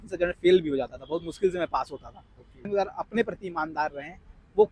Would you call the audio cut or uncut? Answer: cut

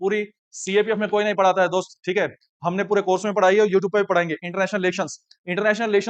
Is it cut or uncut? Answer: uncut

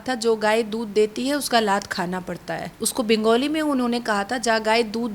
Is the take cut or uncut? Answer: cut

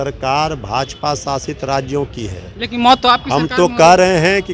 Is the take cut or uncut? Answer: uncut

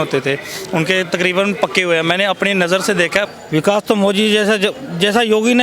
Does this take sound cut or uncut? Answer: cut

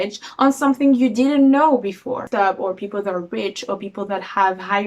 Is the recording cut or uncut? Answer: cut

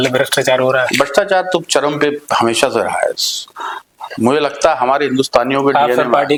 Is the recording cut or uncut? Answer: uncut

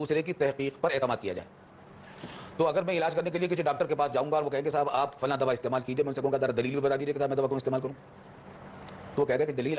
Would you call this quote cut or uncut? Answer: uncut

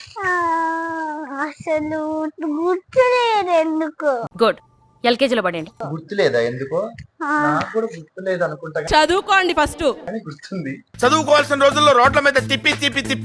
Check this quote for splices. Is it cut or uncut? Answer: uncut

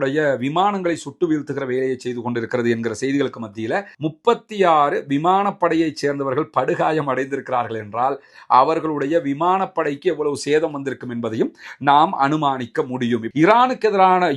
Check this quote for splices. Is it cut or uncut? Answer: cut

